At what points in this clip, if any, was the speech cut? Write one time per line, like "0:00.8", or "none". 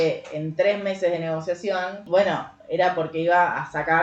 0:02.0